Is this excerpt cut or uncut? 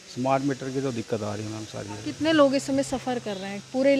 uncut